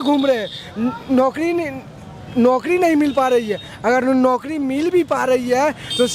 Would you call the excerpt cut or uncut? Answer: uncut